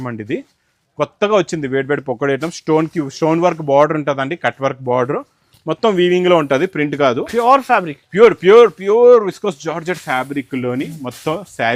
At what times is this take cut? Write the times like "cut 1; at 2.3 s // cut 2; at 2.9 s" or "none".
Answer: none